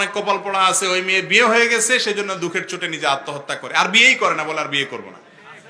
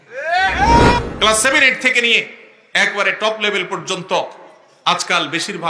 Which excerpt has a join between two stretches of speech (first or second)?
second